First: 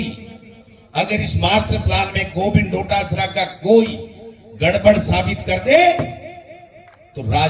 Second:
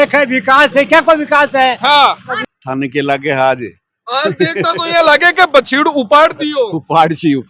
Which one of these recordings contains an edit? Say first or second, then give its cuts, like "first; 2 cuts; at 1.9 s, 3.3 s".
second; 1 cut; at 2.4 s